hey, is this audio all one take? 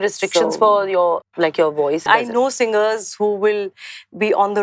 no; 2 cuts; at 1.3 s, 2.0 s

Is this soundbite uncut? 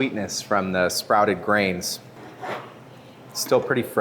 no; 1 cut; at 2.2 s

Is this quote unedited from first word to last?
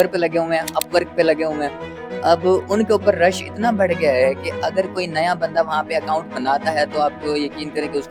yes; 0 cuts

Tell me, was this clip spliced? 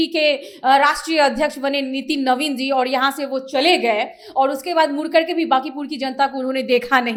no; 0 cuts

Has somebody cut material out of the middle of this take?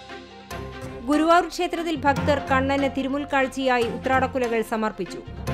yes; 1 cut; at 1.0 s

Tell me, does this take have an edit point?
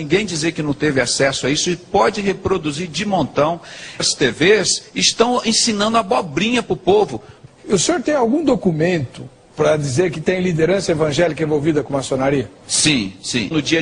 no; 0 cuts

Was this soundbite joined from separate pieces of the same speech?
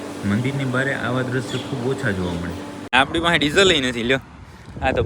yes; 1 cut; at 2.9 s

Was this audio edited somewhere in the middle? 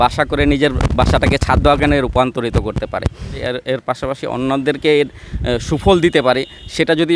yes; 1 cut; at 3.4 s

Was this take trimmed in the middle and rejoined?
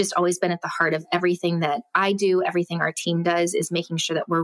no; 0 cuts

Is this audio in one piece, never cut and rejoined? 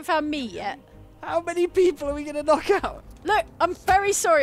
no; 1 cut; at 2.7 s

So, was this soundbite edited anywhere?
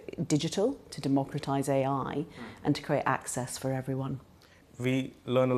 yes; 1 cut; at 4.6 s

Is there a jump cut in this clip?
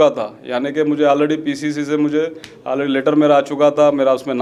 no; 0 cuts

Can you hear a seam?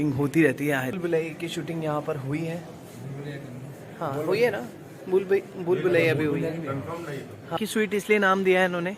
yes; 2 cuts; at 1.0 s, 7.6 s

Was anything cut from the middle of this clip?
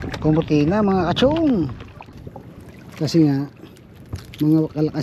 yes; 1 cut; at 2.2 s

